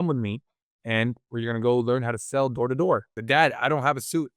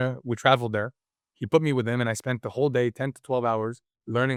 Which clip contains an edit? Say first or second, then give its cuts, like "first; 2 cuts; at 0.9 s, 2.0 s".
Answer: first; 1 cut; at 3.1 s